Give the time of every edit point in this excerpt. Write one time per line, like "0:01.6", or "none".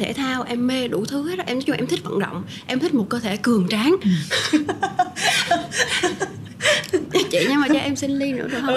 none